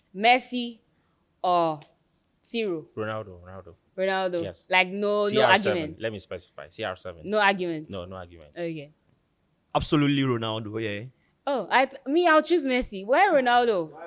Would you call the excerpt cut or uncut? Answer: uncut